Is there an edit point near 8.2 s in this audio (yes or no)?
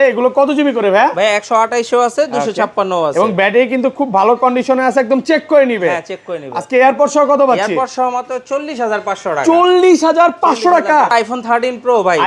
no